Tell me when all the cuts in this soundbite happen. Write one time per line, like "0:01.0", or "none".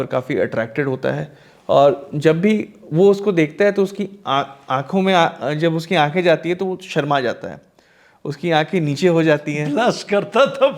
none

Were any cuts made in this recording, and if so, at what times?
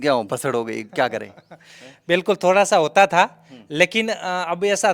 none

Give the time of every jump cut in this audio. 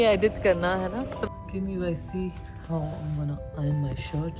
0:01.2

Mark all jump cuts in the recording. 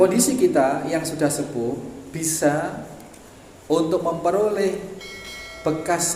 none

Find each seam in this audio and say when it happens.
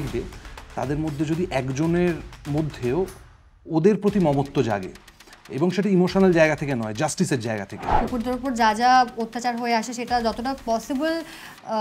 0:07.8

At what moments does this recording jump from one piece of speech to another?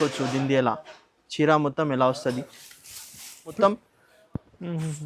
0:03.5

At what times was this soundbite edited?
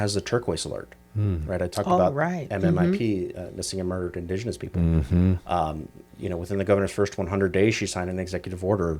none

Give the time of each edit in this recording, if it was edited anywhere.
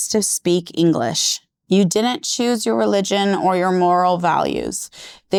none

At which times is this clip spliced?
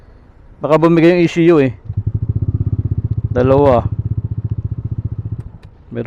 none

